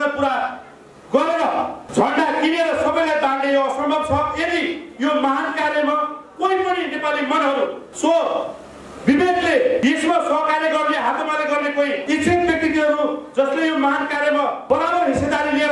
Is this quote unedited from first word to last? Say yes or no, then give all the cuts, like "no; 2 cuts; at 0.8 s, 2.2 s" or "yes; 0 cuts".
no; 5 cuts; at 1.8 s, 7.8 s, 9.8 s, 12.0 s, 14.6 s